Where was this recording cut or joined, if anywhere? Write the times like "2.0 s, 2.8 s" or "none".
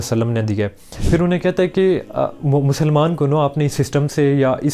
1.0 s

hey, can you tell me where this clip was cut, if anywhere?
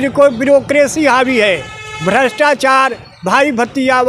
none

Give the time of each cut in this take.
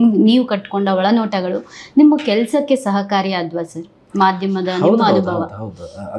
none

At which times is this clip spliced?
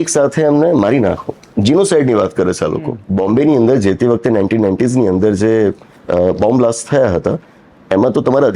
3.0 s

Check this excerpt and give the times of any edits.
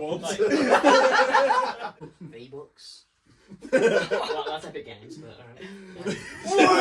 2.0 s

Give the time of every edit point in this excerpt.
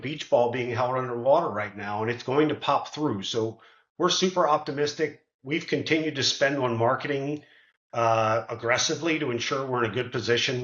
none

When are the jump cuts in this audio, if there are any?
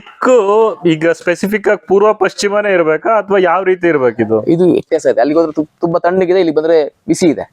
4.9 s

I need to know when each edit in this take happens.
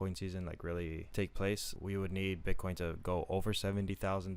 1.1 s, 1.7 s

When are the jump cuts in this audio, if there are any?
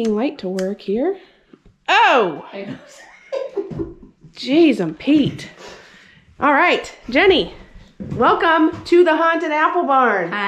none

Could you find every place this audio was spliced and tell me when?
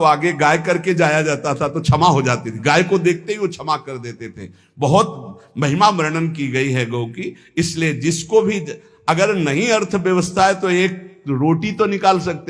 none

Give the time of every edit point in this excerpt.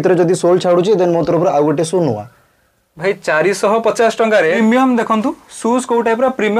4.6 s

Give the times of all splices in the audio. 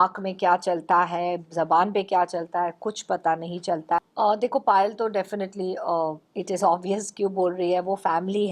4.0 s

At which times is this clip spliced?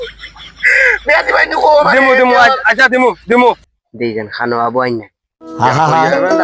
3.6 s

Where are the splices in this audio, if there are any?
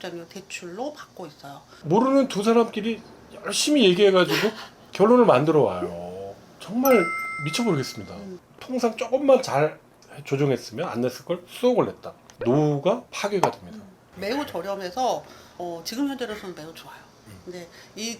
1.7 s, 8.2 s, 14.0 s

